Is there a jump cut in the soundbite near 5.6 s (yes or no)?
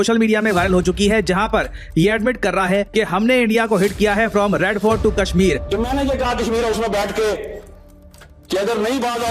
yes